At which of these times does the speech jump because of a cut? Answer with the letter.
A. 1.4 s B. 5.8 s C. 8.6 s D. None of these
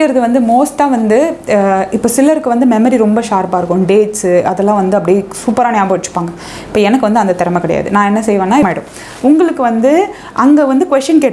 C